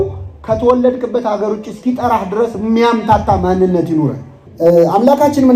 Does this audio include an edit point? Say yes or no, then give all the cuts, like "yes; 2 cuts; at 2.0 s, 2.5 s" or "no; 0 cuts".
no; 0 cuts